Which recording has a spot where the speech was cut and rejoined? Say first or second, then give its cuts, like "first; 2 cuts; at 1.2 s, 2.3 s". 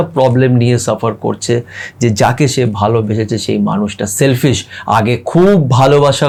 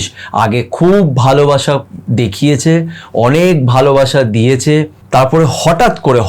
second; 1 cut; at 5.0 s